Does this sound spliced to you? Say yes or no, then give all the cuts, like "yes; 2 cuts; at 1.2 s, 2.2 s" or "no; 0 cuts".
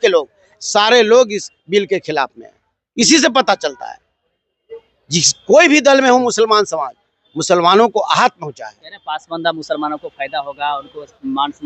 no; 0 cuts